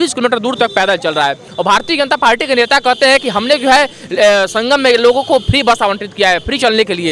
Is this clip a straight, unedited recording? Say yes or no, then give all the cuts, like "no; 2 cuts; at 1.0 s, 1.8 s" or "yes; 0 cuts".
yes; 0 cuts